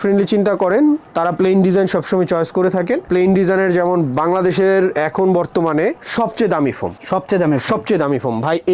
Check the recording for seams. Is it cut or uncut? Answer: uncut